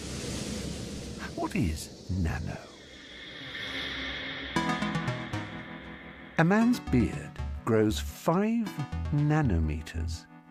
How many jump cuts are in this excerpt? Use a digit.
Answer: 0